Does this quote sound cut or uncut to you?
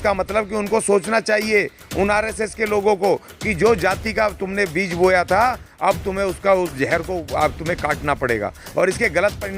uncut